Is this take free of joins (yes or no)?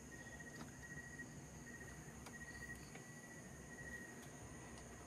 yes